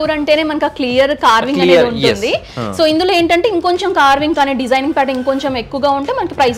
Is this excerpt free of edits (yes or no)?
yes